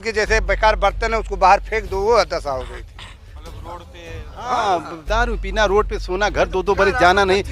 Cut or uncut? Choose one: uncut